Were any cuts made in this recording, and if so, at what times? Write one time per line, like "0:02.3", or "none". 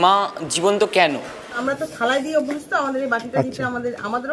0:01.6